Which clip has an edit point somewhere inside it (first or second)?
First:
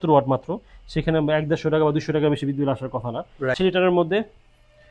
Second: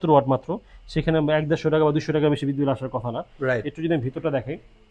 first